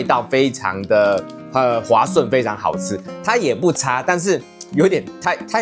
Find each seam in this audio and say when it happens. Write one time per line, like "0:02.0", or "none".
0:03.1